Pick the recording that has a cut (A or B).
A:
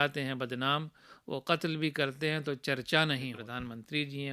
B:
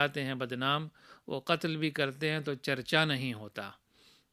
A